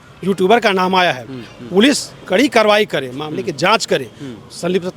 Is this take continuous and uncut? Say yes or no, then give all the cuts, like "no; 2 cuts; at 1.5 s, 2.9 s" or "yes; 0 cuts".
yes; 0 cuts